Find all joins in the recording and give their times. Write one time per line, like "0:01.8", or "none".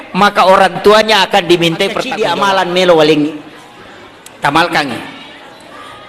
0:02.1